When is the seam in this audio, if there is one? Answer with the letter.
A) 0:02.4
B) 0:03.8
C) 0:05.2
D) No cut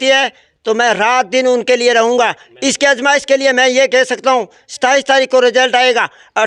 D